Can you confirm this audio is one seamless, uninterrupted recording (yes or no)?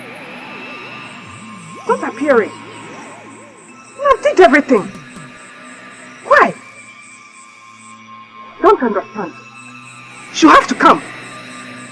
yes